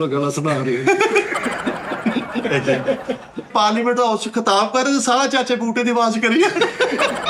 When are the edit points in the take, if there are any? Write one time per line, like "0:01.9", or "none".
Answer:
0:03.5